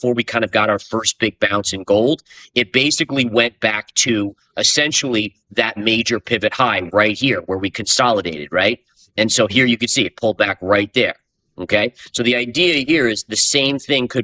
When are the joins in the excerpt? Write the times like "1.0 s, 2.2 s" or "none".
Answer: none